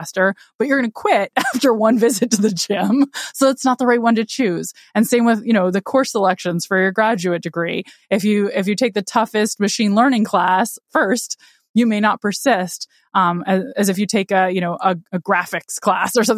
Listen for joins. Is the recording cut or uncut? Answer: uncut